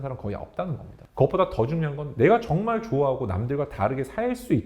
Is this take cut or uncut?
cut